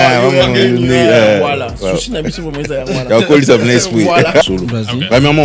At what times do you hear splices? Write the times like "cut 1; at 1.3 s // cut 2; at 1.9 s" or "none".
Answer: cut 1; at 4.4 s